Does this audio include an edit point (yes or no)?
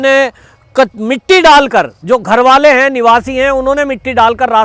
no